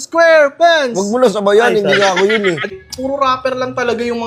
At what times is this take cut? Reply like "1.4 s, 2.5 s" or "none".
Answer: 2.7 s